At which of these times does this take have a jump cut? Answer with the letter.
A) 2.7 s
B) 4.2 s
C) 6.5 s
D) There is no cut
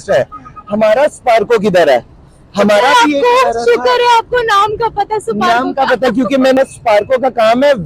C